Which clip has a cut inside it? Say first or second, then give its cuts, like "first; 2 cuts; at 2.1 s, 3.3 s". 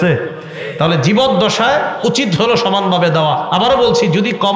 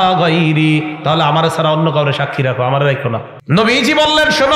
second; 1 cut; at 3.3 s